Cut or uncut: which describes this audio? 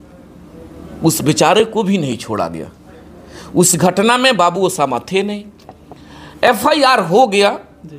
uncut